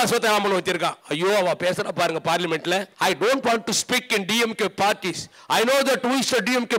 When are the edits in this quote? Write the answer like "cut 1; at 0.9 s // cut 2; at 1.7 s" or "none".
cut 1; at 1.0 s // cut 2; at 2.9 s